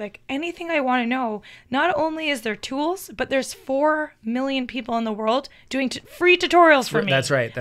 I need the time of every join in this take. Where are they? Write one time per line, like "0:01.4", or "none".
none